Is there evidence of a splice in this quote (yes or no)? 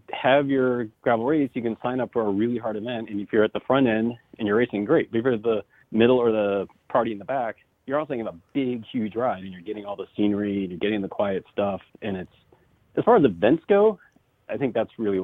yes